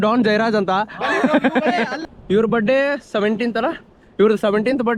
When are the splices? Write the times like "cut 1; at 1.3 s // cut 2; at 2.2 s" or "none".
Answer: cut 1; at 2.0 s